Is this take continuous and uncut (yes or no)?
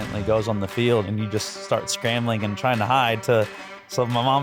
yes